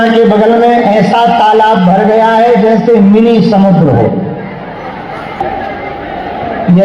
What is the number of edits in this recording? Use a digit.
1